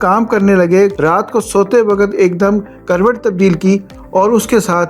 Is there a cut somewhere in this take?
yes; 1 cut; at 1.0 s

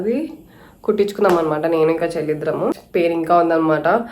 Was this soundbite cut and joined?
yes; 1 cut; at 2.8 s

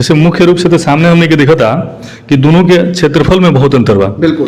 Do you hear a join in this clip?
no; 0 cuts

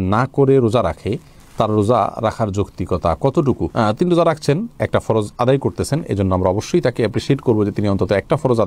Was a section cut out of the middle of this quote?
no; 0 cuts

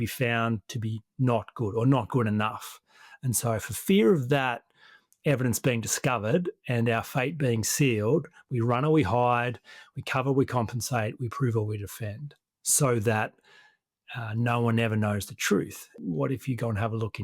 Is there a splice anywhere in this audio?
yes; 1 cut; at 16.0 s

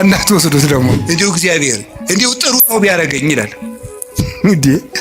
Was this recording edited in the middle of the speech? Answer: yes; 1 cut; at 0.9 s

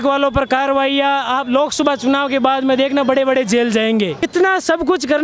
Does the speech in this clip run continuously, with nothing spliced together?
no; 1 cut; at 4.3 s

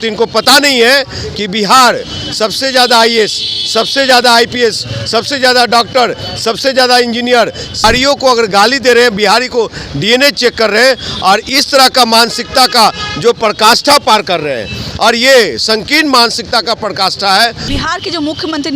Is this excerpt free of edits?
no; 2 cuts; at 7.8 s, 17.6 s

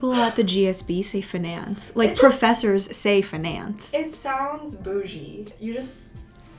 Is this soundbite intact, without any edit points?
no; 1 cut; at 5.4 s

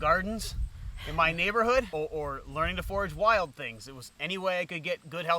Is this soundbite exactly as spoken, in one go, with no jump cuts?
no; 1 cut; at 1.9 s

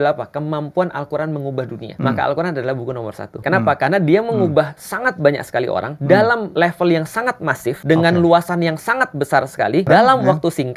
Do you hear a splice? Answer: yes; 6 cuts; at 1.8 s, 3.4 s, 5.9 s, 6.5 s, 7.8 s, 9.9 s

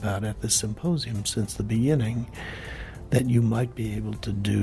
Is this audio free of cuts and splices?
yes; 0 cuts

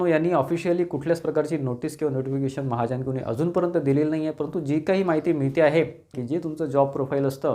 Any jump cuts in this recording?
yes; 1 cut; at 6.1 s

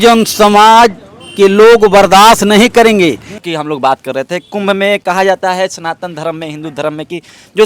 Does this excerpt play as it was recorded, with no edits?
yes; 0 cuts

